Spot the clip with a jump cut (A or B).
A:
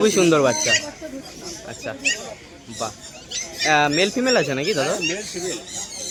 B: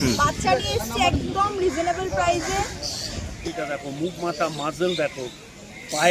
B